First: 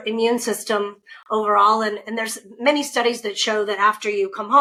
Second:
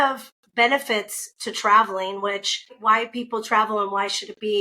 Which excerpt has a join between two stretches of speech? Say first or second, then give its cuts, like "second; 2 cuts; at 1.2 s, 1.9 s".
second; 1 cut; at 2.7 s